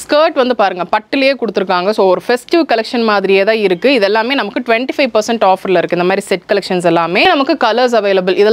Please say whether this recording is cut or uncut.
cut